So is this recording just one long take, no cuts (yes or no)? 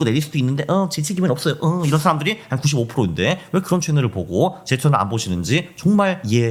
yes